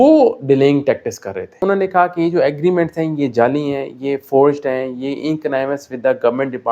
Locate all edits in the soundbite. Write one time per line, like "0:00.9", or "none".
0:01.6